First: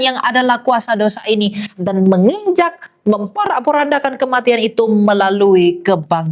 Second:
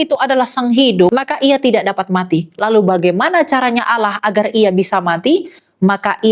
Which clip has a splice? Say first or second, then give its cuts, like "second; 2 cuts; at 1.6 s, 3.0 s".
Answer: second; 1 cut; at 1.1 s